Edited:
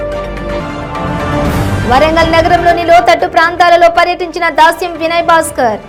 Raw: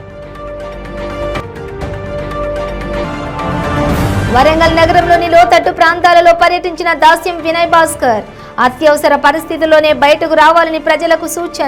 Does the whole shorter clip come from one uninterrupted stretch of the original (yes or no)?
yes